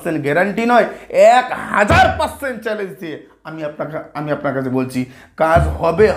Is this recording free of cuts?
yes; 0 cuts

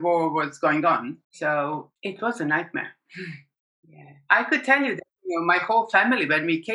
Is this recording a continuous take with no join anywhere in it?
no; 3 cuts; at 1.2 s, 1.9 s, 3.4 s

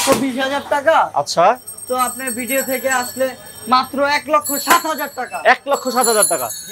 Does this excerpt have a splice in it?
no; 0 cuts

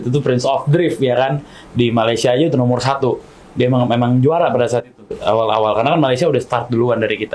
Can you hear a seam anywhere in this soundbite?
no; 0 cuts

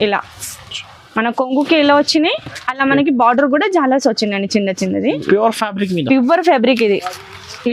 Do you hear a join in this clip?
no; 0 cuts

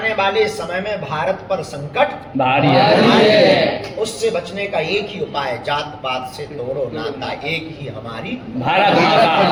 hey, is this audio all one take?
yes; 0 cuts

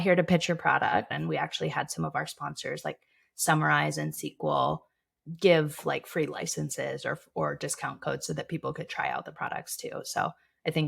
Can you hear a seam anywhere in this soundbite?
yes; 1 cut; at 1.2 s

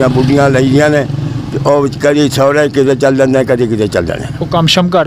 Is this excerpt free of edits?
yes; 0 cuts

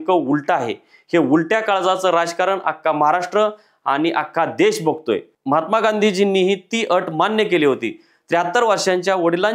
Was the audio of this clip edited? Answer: yes; 1 cut; at 5.3 s

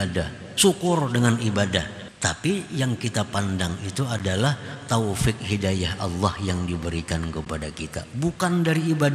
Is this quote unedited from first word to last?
no; 1 cut; at 2.0 s

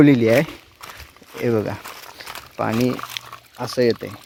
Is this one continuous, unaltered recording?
yes; 0 cuts

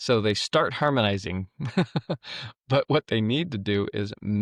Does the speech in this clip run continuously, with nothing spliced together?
yes; 0 cuts

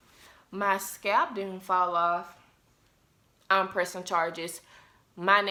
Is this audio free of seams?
yes; 0 cuts

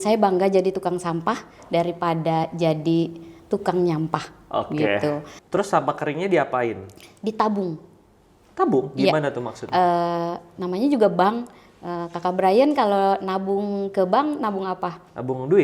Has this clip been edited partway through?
yes; 1 cut; at 5.3 s

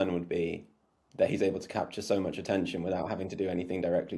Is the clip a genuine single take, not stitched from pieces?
yes; 0 cuts

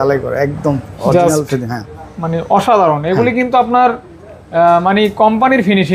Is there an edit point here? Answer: no; 0 cuts

